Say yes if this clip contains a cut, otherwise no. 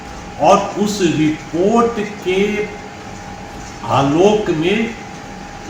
no